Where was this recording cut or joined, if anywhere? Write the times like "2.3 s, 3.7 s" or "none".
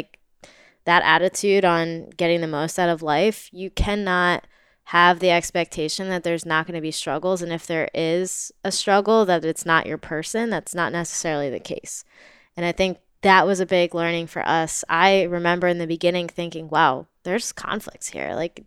none